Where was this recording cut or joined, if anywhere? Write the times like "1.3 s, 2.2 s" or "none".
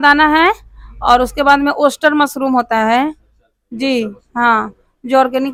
none